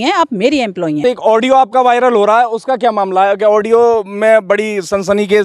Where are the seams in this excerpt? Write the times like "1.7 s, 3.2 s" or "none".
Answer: 1.0 s